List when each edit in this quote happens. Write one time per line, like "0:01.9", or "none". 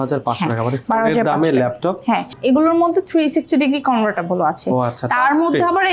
0:02.3